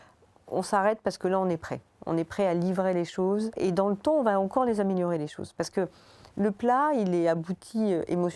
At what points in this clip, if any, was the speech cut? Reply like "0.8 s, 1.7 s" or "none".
3.5 s